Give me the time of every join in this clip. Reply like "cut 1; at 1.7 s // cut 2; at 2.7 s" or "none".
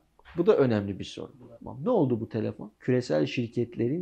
cut 1; at 1.3 s // cut 2; at 2.7 s

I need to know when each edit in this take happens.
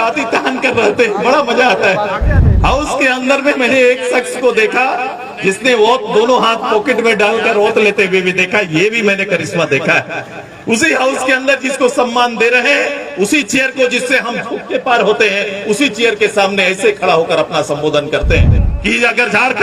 cut 1; at 18.6 s

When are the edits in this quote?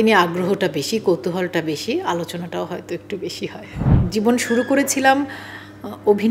cut 1; at 3.8 s

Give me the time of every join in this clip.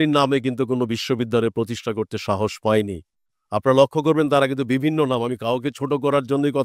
none

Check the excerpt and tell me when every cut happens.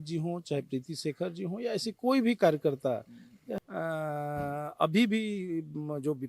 cut 1; at 3.5 s

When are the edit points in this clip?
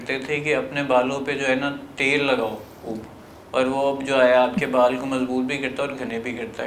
none

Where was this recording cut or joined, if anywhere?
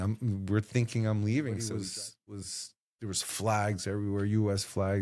cut 1; at 1.7 s

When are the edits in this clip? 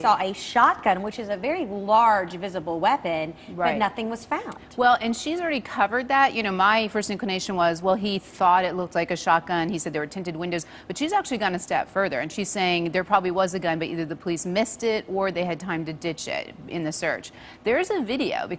cut 1; at 14.1 s

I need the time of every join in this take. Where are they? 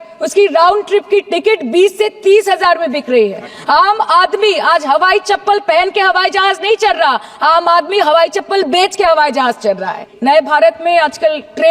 cut 1; at 10.0 s

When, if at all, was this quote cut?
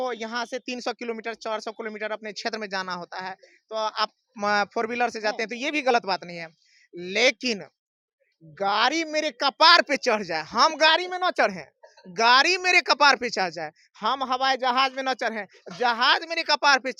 none

